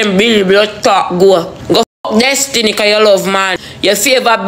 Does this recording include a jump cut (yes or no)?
yes